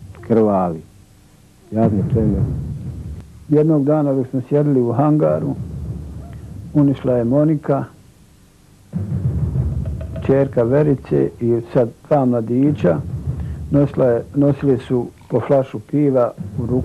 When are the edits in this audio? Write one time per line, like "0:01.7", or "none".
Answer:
0:12.8